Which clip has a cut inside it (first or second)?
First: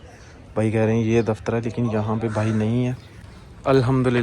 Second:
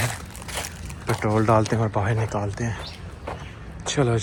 first